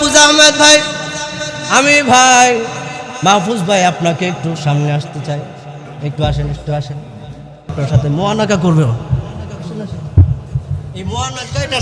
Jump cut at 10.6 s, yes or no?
no